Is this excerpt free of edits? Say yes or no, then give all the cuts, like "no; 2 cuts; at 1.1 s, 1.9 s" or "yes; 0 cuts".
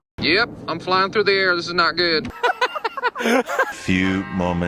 no; 2 cuts; at 2.3 s, 3.7 s